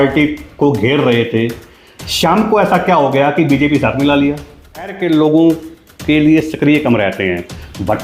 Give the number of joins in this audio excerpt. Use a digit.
1